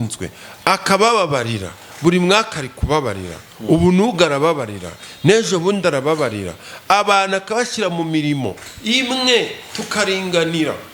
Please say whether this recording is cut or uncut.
uncut